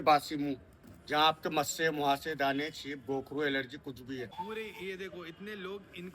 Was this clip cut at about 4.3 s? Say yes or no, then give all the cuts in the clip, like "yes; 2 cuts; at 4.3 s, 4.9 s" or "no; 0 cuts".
yes; 1 cut; at 4.3 s